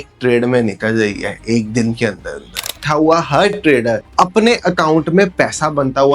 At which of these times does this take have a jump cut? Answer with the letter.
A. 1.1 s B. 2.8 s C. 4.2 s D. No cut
B